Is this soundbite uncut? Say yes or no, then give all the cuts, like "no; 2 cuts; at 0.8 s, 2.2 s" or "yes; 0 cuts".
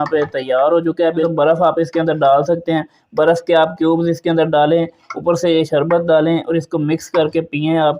no; 1 cut; at 1.2 s